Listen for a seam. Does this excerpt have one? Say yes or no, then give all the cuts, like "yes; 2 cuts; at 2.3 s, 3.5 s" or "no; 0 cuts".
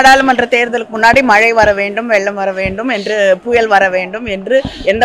no; 0 cuts